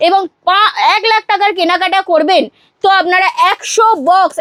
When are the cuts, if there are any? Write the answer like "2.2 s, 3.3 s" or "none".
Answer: none